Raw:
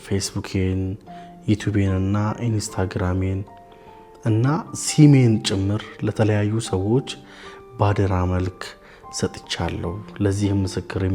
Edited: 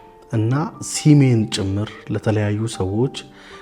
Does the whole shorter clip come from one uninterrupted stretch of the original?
yes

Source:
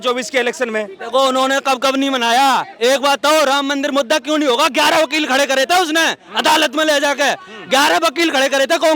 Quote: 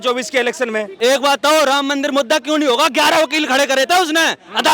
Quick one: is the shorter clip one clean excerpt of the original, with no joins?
no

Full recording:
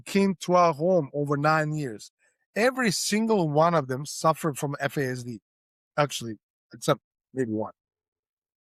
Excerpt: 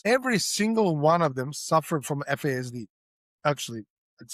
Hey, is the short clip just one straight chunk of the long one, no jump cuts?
yes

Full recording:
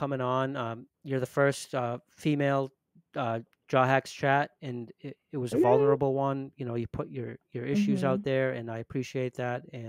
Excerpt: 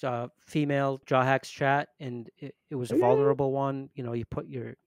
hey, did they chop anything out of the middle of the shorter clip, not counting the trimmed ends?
yes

